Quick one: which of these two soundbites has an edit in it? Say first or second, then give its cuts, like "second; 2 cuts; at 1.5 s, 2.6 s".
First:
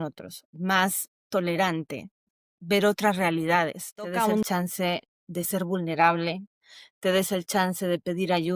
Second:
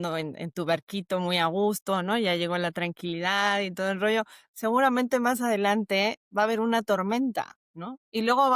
first; 2 cuts; at 2.2 s, 4.2 s